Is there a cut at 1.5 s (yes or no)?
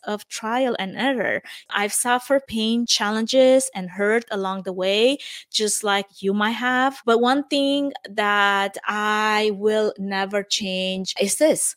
yes